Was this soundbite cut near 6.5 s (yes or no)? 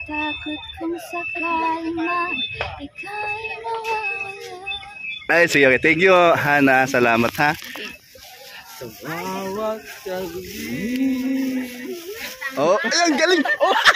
no